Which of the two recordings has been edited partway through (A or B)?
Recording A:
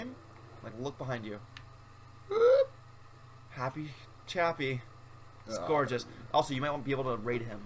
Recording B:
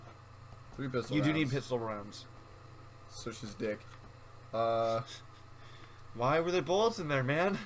A